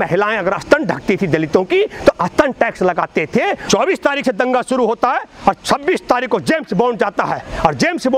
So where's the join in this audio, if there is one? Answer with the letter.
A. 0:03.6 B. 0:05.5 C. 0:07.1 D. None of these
A